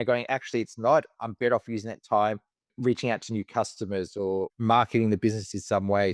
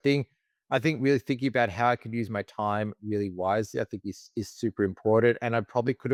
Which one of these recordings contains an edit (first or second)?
first